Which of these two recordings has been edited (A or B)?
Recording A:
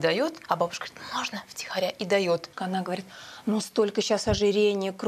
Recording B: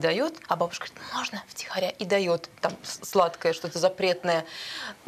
A